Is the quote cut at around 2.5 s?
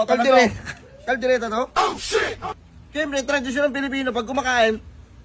yes; 1 cut; at 2.5 s

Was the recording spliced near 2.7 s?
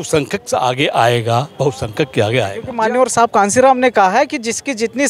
yes; 1 cut; at 2.7 s

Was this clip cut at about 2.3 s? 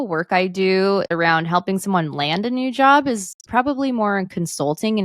no; 1 cut; at 1.1 s

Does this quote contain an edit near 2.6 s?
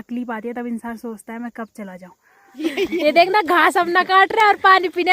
yes; 1 cut; at 2.6 s

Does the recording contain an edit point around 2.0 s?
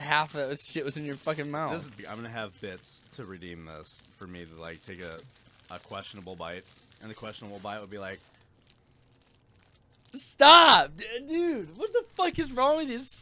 yes; 1 cut; at 2.0 s

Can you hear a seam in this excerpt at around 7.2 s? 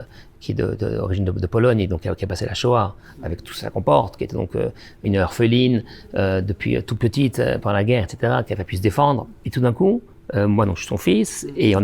no; 2 cuts; at 5.0 s, 9.4 s

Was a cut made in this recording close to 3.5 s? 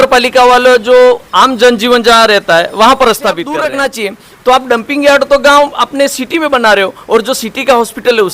yes; 1 cut; at 3.5 s

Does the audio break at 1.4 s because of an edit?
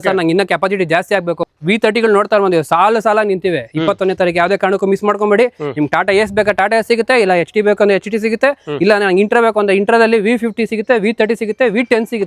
yes; 1 cut; at 1.4 s

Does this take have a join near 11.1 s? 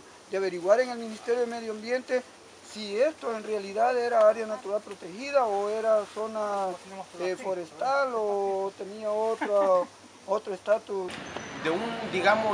yes; 1 cut; at 11.1 s

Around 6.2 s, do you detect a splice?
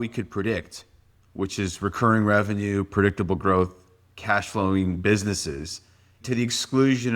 yes; 1 cut; at 6.2 s

